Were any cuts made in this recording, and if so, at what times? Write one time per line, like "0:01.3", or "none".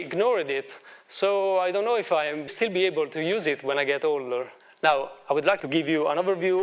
0:02.5
0:04.6
0:05.6